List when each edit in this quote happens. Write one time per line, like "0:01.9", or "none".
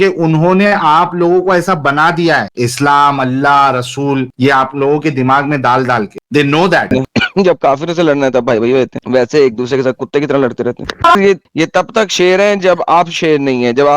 0:06.9
0:11.2